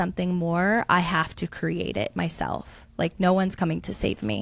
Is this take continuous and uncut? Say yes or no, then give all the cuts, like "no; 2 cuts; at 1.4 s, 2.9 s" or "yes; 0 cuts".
yes; 0 cuts